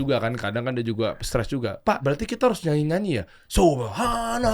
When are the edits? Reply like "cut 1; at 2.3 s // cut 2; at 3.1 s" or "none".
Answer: cut 1; at 2.0 s